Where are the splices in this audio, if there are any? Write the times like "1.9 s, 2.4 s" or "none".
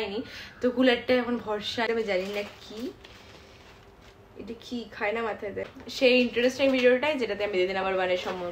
1.9 s, 5.7 s